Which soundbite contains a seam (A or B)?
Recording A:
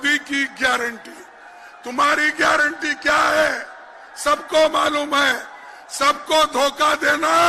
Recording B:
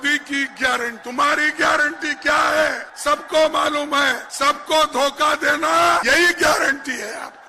B